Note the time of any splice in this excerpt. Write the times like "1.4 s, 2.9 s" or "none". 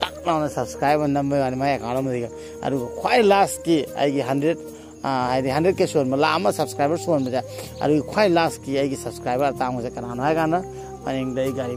none